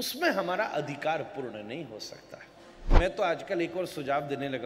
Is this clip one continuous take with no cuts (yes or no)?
no